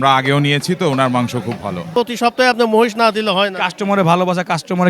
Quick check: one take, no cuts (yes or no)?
no